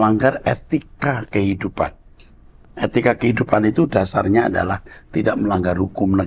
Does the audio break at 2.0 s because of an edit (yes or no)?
no